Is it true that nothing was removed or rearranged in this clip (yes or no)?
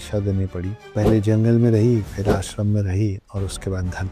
yes